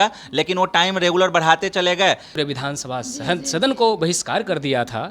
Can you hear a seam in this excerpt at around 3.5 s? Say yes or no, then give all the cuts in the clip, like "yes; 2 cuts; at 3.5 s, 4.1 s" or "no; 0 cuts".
no; 1 cut; at 2.3 s